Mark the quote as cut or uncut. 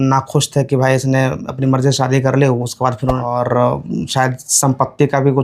cut